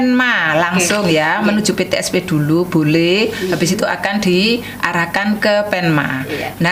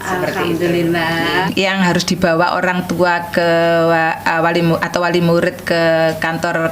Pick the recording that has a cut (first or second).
second